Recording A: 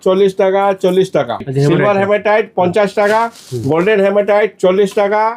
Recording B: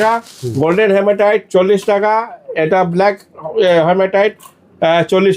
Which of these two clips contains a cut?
A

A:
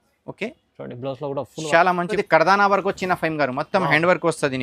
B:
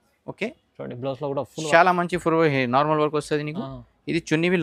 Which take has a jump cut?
A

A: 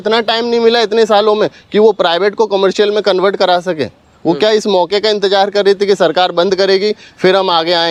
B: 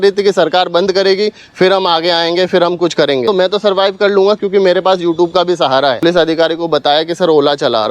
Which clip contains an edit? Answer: B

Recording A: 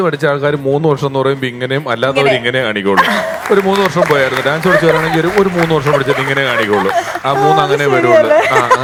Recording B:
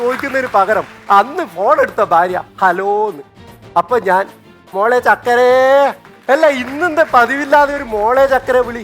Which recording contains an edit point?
B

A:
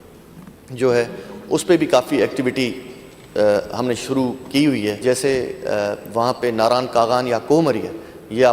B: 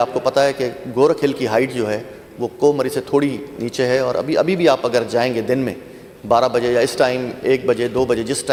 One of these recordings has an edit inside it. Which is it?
A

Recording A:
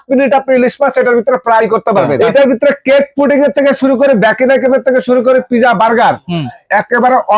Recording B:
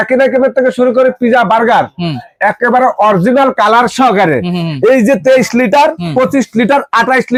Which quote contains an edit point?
A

